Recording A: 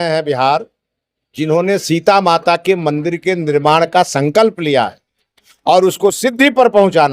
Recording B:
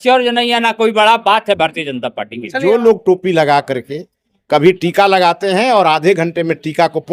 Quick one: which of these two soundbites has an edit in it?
B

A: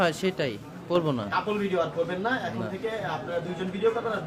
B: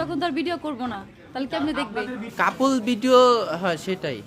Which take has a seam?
B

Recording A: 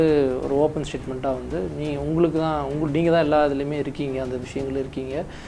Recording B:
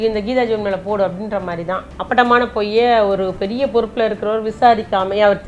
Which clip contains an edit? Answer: B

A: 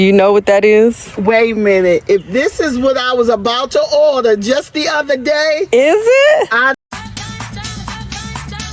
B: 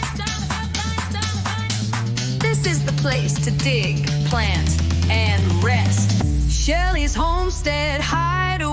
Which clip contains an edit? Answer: A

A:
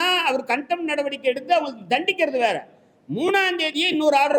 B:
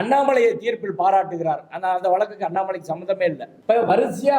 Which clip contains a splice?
B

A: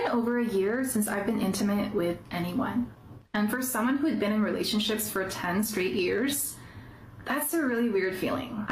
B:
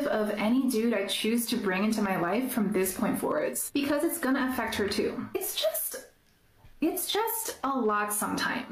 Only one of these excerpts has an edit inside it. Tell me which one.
B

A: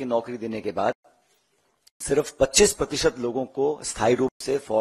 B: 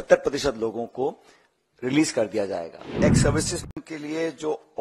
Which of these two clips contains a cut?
B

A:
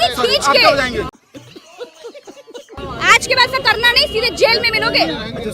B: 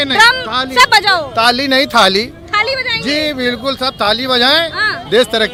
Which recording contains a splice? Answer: A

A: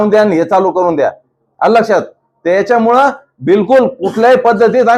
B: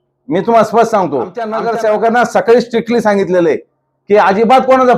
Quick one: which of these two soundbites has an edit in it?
B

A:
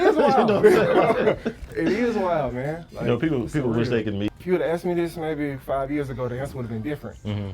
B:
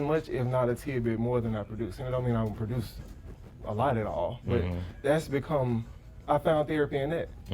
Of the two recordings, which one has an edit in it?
A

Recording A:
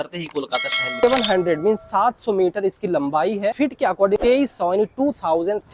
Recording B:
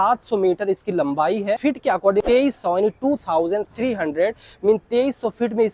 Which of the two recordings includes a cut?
A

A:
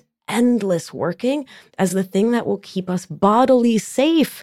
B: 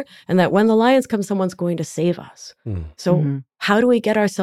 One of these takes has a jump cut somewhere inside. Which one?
B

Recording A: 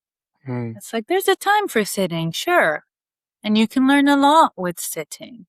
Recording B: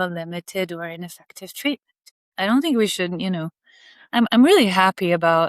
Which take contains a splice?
B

